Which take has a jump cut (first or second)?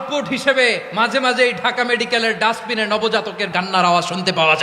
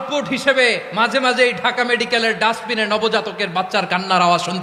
first